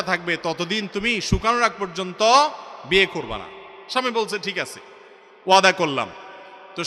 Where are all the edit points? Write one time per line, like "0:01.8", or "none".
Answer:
none